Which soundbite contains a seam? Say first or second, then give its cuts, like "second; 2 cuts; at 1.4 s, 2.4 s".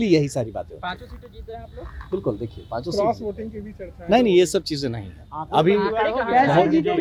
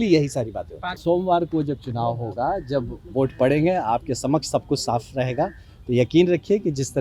second; 1 cut; at 0.9 s